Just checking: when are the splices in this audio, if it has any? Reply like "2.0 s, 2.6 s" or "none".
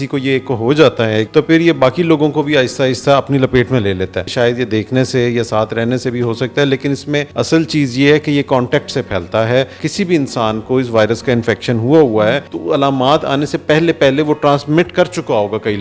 1.3 s, 4.3 s, 7.3 s, 9.8 s, 12.5 s

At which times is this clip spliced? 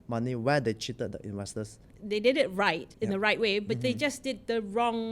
1.9 s, 2.9 s

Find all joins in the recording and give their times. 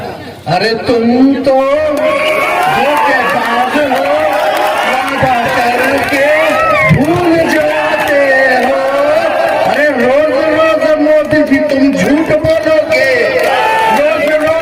none

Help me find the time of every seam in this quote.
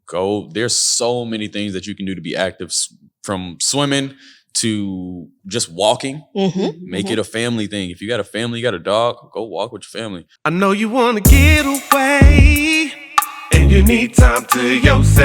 10.3 s

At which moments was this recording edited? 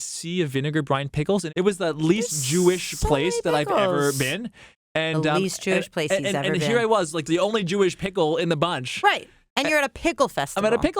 7.2 s

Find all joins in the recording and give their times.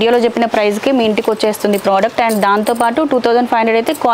none

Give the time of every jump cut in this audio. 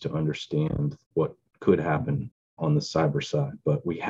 1.0 s

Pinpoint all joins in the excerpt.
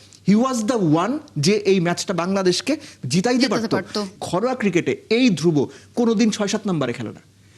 4.1 s

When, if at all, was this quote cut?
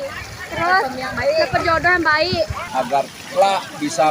2.6 s

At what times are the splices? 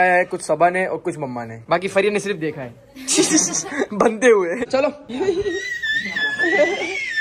4.7 s

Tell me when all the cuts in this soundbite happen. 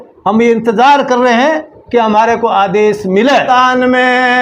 3.5 s

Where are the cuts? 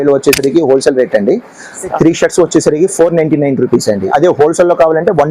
1.9 s, 4.1 s

